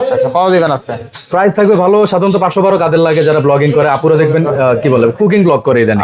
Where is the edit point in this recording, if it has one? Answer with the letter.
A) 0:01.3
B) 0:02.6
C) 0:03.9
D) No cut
D